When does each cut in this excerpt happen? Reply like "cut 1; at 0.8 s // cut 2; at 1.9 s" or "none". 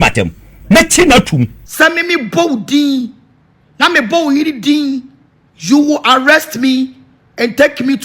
cut 1; at 1.6 s